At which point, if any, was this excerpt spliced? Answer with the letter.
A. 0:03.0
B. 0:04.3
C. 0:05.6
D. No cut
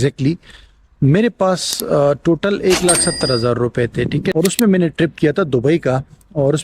B